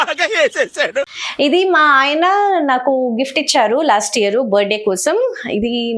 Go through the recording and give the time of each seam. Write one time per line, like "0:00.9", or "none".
0:01.2